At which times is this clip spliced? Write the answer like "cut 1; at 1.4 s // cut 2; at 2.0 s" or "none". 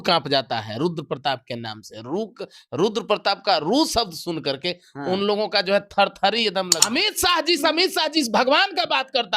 cut 1; at 6.8 s

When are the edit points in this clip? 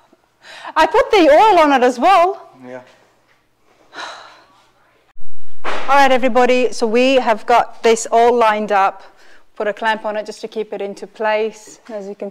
cut 1; at 5.3 s

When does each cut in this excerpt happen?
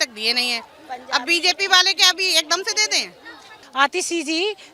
cut 1; at 3.6 s

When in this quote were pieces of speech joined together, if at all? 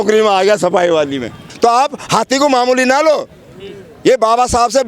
cut 1; at 1.4 s

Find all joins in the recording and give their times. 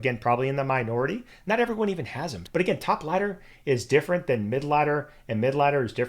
cut 1; at 2.4 s

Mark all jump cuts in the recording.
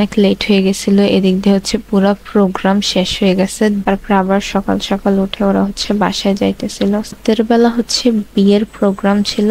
cut 1; at 3.8 s // cut 2; at 7.1 s

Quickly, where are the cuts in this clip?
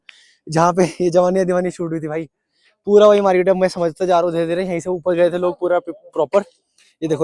none

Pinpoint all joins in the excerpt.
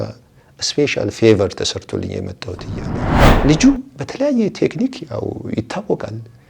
cut 1; at 3.0 s

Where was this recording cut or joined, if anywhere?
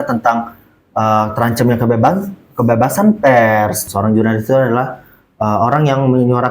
cut 1; at 3.8 s

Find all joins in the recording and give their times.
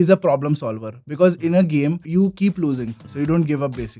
cut 1; at 2.0 s // cut 2; at 3.0 s

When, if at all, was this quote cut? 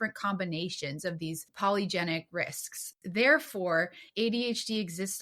cut 1; at 1.5 s // cut 2; at 3.0 s

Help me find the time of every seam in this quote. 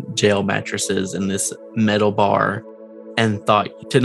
none

